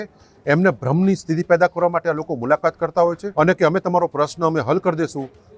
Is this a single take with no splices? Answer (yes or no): no